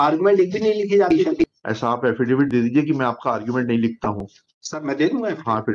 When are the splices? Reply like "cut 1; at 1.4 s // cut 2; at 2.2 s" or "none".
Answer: cut 1; at 1.2 s